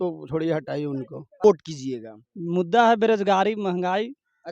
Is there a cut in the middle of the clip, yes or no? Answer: yes